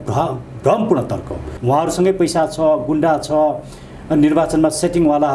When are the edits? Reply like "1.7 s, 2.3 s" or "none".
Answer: 1.5 s